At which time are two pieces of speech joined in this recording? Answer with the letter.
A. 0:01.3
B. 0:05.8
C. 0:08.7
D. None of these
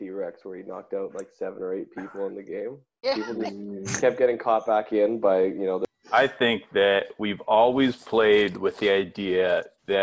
B